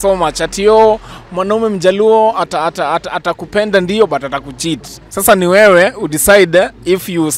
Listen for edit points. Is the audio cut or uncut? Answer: uncut